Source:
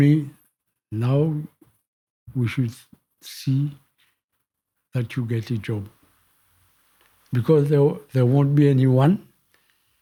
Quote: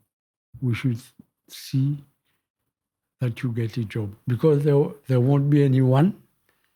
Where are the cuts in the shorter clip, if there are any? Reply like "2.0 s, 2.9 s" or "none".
4.2 s